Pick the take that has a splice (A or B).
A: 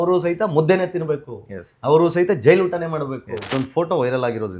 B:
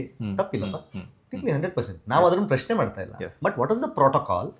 A